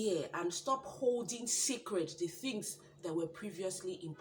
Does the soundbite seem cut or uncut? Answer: uncut